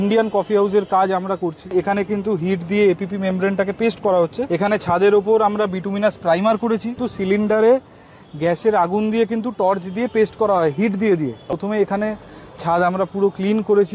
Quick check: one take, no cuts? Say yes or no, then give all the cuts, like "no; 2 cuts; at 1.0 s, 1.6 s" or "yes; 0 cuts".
no; 4 cuts; at 1.7 s, 4.4 s, 7.0 s, 11.6 s